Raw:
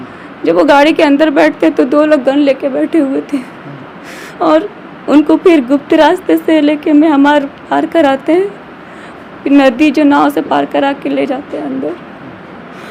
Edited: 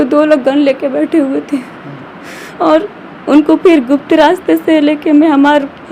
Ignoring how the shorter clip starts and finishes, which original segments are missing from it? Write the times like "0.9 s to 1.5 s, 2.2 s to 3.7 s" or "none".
none

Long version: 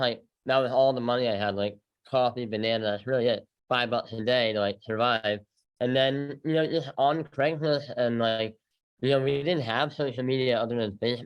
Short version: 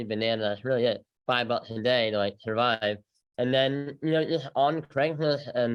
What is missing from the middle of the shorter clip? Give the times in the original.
none

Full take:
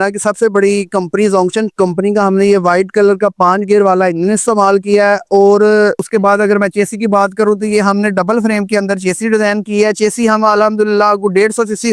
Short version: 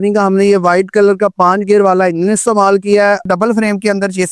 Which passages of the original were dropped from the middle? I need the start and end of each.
5.2 s to 8.1 s

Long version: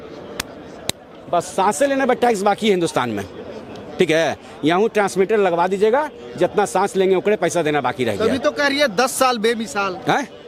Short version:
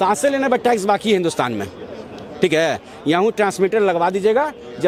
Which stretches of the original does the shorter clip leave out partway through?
none

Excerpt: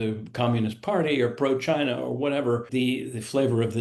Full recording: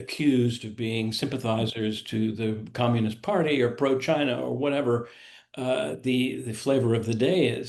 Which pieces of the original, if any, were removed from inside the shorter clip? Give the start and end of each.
5.1 s to 6.0 s

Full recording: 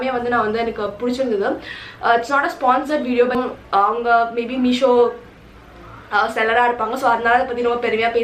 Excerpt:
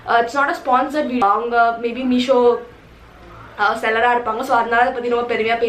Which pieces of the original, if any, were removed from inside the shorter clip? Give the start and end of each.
3.1 s to 3.7 s

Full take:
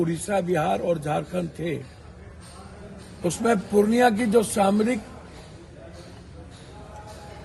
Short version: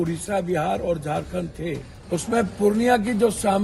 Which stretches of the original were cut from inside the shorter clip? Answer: 1.9 s to 3.0 s

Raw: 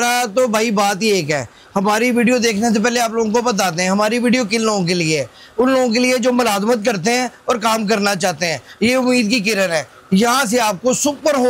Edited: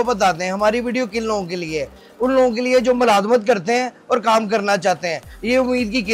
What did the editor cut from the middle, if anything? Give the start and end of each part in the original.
none

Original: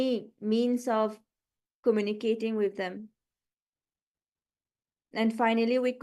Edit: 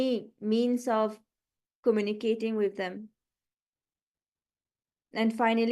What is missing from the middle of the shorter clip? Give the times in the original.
none

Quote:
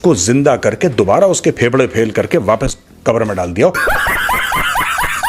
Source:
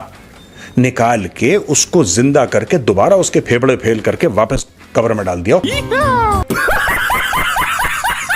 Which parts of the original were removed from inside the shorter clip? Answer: 5.6 s to 6.5 s

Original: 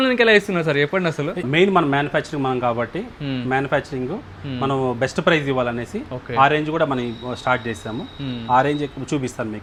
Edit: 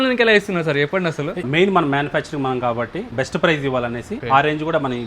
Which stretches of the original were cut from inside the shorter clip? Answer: 3.1 s to 5.0 s, 6.0 s to 6.2 s

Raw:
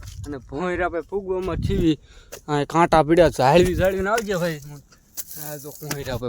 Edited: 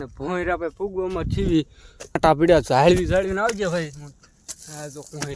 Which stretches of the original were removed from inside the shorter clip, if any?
2.5 s to 2.9 s

